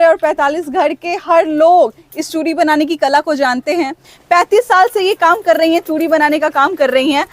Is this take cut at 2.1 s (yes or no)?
no